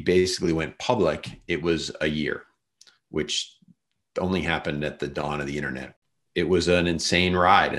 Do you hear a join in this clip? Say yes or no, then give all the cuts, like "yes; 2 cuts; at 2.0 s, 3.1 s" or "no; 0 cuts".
yes; 1 cut; at 5.9 s